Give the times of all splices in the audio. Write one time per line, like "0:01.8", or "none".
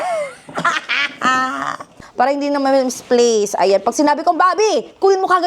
0:02.1